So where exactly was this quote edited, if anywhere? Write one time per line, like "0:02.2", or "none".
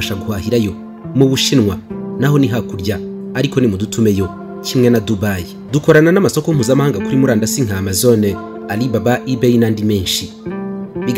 0:05.5

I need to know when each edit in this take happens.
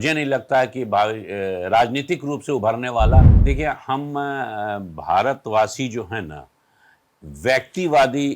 0:03.3

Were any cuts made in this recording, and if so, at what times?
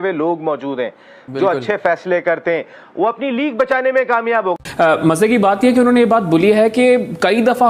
0:04.6

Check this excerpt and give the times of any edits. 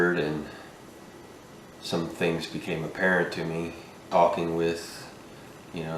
0:03.8

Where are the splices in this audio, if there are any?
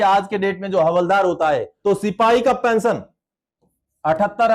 0:01.7

